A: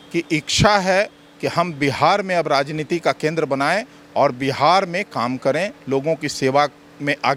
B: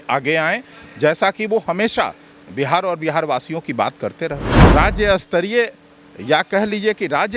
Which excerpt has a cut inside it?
B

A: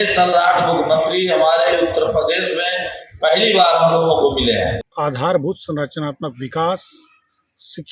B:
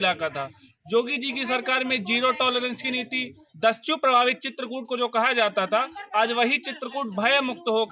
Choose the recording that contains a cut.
A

